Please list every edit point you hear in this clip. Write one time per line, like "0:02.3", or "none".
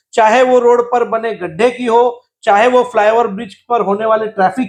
none